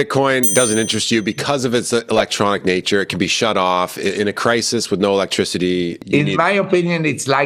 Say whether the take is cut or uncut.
uncut